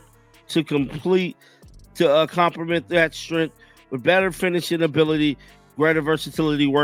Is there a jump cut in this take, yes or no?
no